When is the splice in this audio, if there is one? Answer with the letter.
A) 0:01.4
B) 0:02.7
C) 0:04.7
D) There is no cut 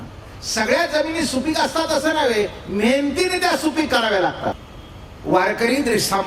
C